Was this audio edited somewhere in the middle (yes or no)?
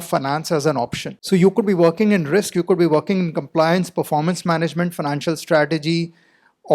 yes